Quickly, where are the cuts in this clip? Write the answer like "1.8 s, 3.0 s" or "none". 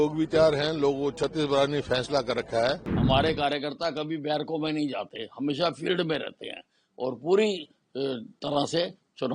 2.9 s